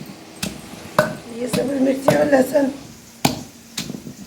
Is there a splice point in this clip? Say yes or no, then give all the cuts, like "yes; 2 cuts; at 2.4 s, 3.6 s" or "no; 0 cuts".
yes; 1 cut; at 3.0 s